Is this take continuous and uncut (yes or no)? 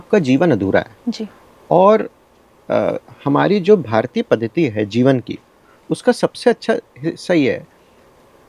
yes